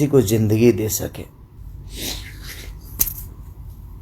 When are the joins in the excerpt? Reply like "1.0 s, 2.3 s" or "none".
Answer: 1.6 s